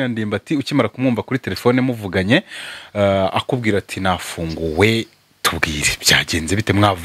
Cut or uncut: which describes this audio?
uncut